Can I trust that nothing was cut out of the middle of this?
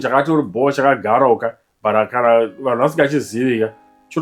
yes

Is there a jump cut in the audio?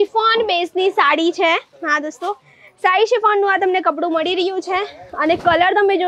no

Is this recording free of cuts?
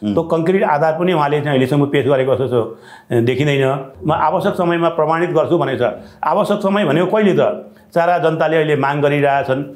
no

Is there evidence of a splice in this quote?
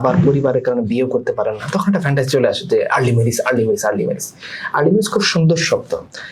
no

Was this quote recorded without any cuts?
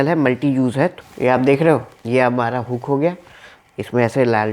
no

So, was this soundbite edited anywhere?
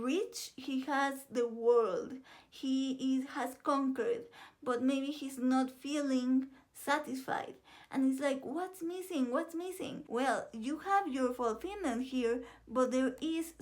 yes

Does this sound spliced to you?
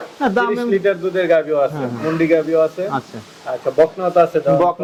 no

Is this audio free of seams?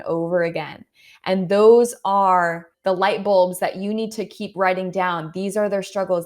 no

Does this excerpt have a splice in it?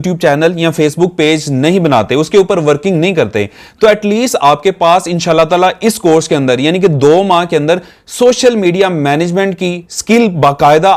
no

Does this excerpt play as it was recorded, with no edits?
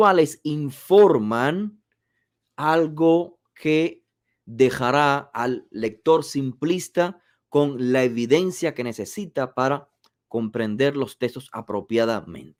yes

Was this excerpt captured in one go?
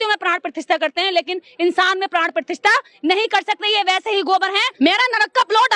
no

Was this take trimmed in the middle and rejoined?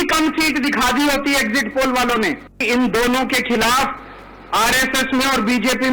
yes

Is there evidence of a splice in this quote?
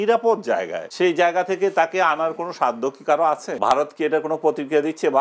yes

